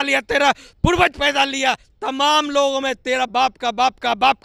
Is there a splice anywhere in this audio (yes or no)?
no